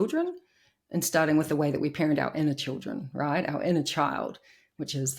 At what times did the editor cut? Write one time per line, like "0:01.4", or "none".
none